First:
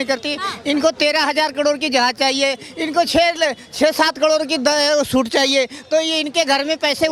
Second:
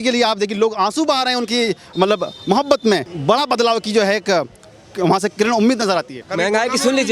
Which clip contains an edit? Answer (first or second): second